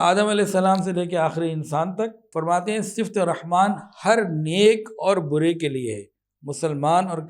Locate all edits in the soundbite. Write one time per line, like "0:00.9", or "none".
0:02.2